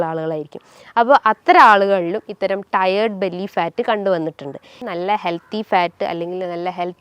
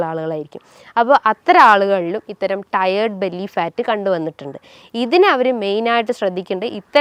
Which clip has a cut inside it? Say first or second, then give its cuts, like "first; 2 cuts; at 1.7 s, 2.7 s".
first; 1 cut; at 4.8 s